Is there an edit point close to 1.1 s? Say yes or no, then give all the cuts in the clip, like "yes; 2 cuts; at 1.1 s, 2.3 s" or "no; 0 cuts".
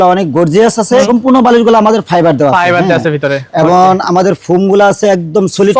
yes; 1 cut; at 1.1 s